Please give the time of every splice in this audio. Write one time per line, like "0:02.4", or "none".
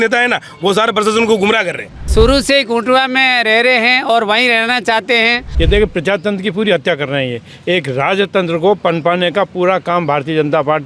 0:02.0
0:05.4